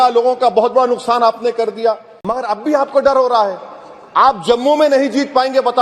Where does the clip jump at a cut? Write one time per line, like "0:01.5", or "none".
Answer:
0:02.2